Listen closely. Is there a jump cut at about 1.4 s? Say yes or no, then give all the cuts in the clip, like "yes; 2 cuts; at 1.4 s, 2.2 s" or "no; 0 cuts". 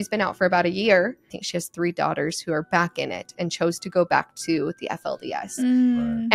yes; 1 cut; at 1.4 s